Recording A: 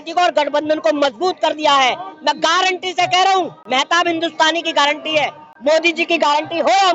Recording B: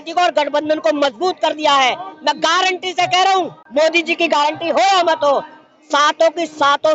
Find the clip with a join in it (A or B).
B